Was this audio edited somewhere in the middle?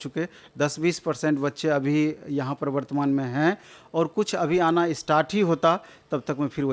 no; 0 cuts

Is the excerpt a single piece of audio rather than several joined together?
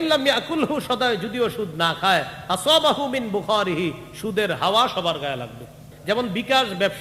no; 1 cut; at 5.9 s

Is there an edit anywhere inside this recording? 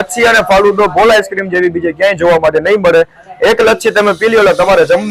no; 0 cuts

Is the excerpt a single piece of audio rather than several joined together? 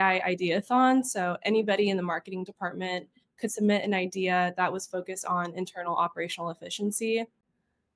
yes; 0 cuts

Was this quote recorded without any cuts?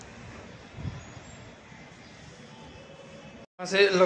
yes; 0 cuts

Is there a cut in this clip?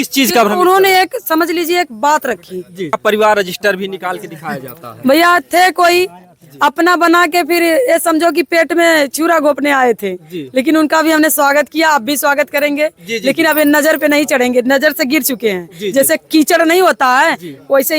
yes; 1 cut; at 2.9 s

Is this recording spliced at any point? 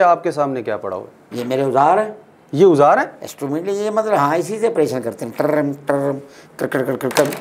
no; 0 cuts

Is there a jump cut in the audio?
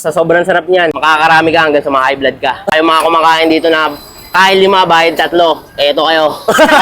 yes; 2 cuts; at 1.0 s, 2.7 s

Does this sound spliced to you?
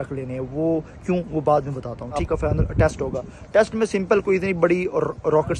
yes; 1 cut; at 2.2 s

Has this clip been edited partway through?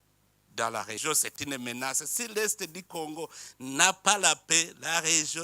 yes; 1 cut; at 1.0 s

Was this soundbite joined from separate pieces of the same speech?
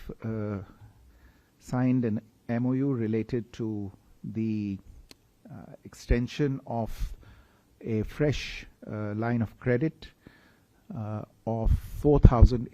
no; 0 cuts

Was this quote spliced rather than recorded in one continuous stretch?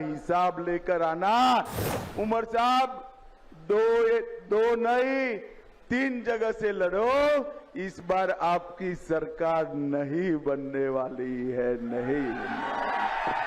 yes; 1 cut; at 1.8 s

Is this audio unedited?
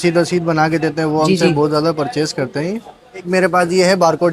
no; 1 cut; at 3.3 s

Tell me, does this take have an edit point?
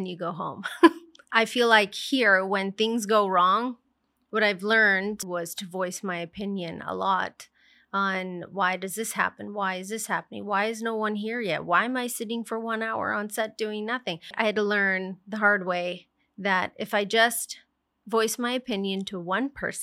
yes; 3 cuts; at 1.2 s, 5.2 s, 14.3 s

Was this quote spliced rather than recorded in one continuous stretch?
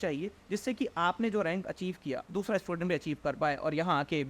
no; 0 cuts

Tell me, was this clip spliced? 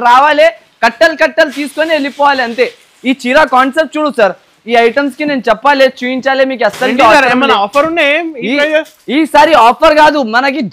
no; 0 cuts

